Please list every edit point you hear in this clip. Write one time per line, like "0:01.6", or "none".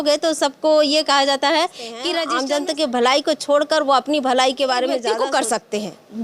0:02.1
0:05.1